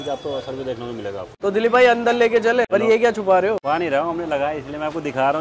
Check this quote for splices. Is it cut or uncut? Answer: cut